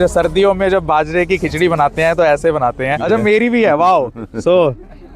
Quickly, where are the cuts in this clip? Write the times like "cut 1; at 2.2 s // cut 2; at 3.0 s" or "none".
cut 1; at 3.1 s